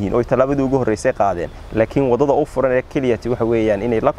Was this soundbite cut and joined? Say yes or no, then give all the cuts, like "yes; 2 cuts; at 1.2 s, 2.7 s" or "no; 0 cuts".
no; 0 cuts